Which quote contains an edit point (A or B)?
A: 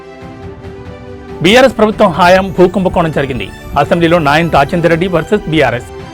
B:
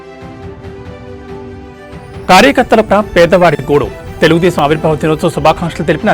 B